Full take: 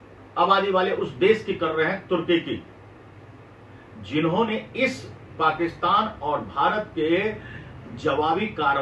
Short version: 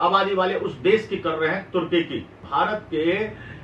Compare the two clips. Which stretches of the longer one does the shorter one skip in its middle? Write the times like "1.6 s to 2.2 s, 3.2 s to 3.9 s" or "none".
2.8 s to 6.5 s